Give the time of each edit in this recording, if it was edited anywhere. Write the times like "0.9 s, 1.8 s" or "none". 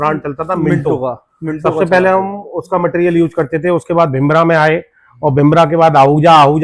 none